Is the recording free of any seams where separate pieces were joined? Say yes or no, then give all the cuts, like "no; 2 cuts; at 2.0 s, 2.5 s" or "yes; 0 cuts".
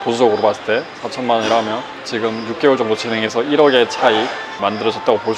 yes; 0 cuts